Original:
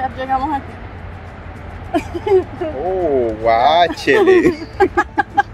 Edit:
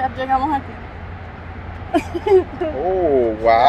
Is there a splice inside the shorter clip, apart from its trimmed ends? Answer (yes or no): no